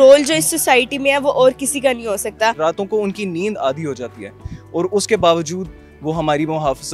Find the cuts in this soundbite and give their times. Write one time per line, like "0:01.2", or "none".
0:02.6